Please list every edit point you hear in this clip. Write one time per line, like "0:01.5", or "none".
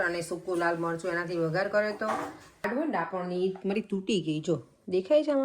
0:02.6